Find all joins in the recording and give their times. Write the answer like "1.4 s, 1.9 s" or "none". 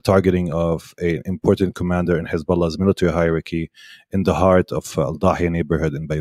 none